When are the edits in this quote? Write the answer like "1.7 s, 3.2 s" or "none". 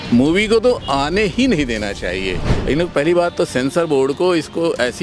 2.5 s